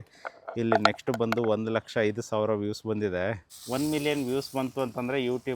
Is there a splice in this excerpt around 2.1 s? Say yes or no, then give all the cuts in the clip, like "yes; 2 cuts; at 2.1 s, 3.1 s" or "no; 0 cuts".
no; 1 cut; at 3.5 s